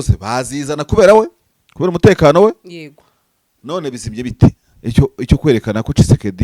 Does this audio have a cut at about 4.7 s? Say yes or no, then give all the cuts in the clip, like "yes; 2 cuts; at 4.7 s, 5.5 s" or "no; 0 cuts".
yes; 1 cut; at 4.7 s